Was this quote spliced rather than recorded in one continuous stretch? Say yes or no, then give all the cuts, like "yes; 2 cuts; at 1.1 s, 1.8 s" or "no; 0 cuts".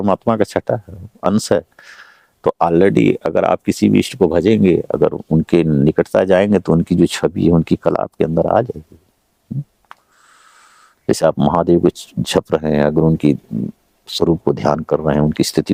no; 0 cuts